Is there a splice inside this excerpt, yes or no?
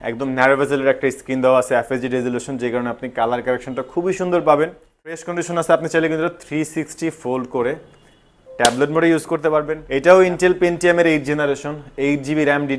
yes